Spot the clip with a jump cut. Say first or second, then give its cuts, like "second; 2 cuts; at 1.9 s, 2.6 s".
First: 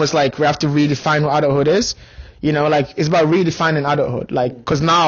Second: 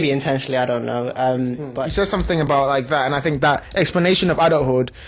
second; 1 cut; at 1.7 s